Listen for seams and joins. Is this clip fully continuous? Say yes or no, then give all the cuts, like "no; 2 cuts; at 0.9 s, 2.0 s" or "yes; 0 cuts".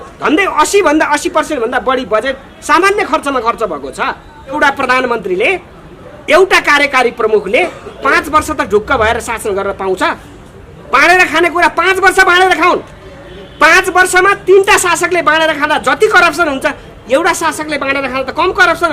no; 1 cut; at 4.6 s